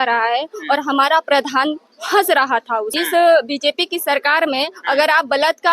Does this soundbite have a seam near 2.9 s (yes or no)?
yes